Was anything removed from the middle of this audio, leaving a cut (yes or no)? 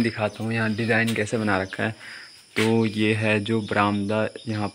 no